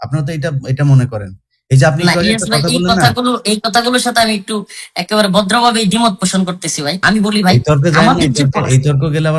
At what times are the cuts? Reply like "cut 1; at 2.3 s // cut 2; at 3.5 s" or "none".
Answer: cut 1; at 7.0 s